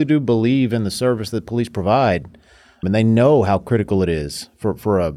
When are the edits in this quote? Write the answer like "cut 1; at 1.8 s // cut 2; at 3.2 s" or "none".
cut 1; at 2.8 s

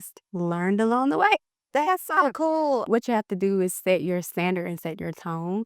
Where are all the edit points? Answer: cut 1; at 2.9 s

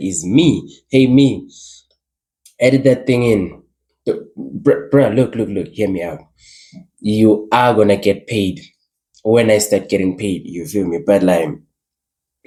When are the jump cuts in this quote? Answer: none

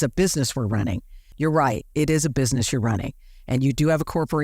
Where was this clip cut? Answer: cut 1; at 1.2 s

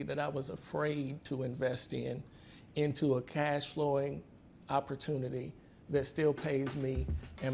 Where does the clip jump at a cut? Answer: none

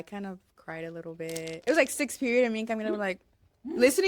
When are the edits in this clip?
cut 1; at 1.6 s

